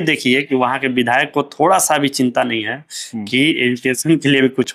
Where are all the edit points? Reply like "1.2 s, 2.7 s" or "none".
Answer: none